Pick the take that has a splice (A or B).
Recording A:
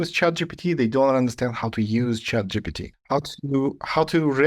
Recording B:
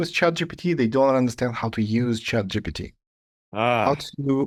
A